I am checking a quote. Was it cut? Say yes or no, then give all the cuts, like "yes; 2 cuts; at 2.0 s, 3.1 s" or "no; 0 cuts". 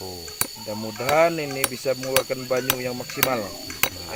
no; 0 cuts